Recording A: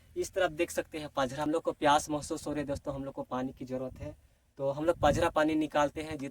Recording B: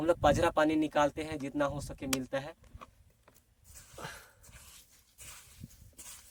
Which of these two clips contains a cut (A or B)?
A